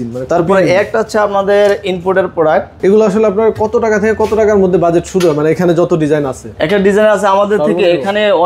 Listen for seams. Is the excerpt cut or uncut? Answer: cut